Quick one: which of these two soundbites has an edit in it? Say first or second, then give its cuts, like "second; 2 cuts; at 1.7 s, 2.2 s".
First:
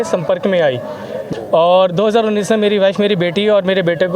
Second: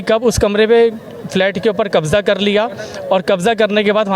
first; 1 cut; at 1.2 s